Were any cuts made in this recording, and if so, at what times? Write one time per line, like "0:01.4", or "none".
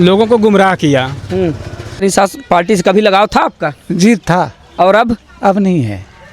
0:01.9